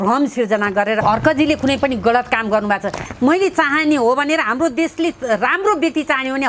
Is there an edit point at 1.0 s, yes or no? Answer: yes